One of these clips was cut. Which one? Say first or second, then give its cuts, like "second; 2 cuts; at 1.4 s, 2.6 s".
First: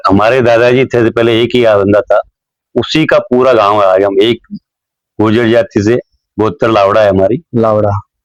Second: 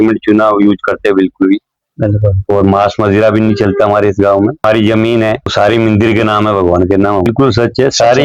second; 3 cuts; at 4.6 s, 5.5 s, 7.2 s